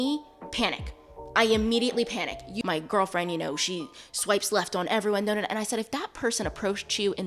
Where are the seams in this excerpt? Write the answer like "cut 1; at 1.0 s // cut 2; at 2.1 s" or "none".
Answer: cut 1; at 2.5 s